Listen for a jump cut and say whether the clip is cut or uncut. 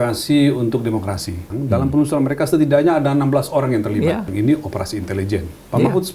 cut